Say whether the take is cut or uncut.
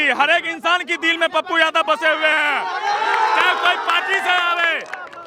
uncut